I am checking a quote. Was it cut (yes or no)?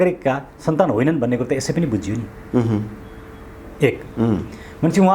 no